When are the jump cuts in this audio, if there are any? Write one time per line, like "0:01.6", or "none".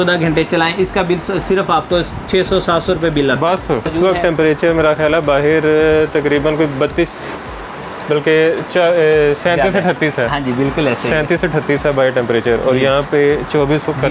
0:03.9